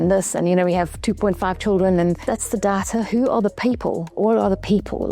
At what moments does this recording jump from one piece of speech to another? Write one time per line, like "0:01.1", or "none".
0:02.2
0:04.1